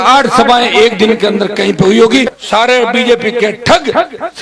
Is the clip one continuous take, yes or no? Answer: no